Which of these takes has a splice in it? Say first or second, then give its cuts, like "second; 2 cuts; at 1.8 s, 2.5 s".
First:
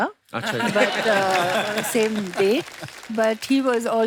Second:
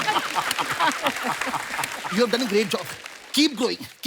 second; 1 cut; at 2.0 s